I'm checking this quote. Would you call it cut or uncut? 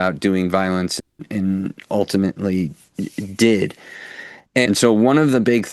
cut